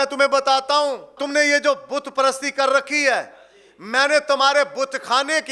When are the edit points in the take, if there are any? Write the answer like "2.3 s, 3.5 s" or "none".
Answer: 1.1 s